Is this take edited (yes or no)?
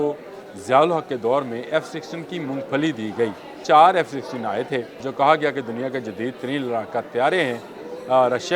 yes